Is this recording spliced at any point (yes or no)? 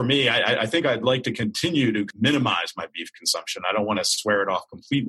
yes